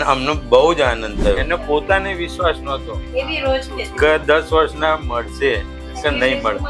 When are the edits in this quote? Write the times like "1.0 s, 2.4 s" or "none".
1.4 s